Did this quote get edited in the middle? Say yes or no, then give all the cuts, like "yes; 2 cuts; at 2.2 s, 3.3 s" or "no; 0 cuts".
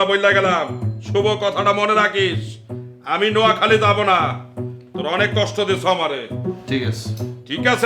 no; 0 cuts